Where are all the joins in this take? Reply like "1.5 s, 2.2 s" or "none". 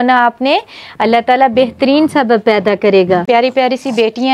3.2 s